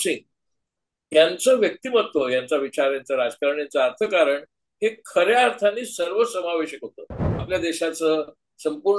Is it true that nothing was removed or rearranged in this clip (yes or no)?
no